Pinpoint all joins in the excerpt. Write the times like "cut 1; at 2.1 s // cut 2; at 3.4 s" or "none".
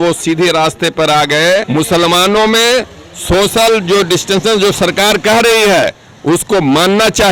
cut 1; at 1.7 s